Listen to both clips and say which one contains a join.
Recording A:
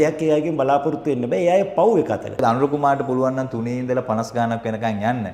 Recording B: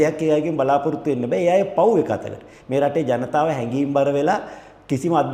A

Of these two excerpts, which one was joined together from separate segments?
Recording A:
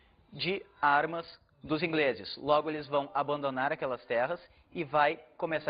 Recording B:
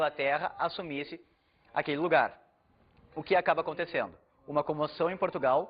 B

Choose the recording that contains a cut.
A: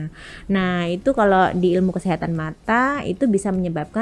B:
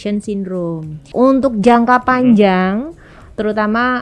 B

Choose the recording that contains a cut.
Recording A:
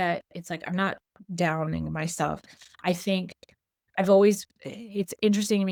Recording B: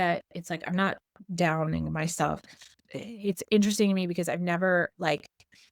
B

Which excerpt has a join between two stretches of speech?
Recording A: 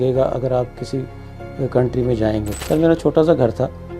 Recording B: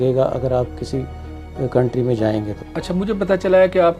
A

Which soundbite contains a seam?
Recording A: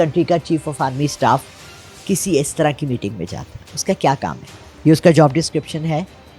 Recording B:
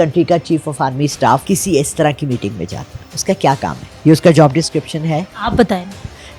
B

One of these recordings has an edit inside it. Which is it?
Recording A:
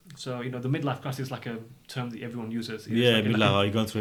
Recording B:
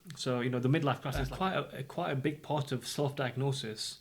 B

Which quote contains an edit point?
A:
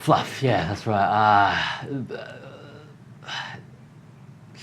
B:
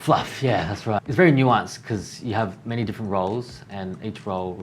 B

